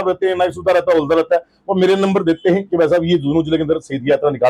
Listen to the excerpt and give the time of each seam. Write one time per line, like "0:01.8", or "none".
none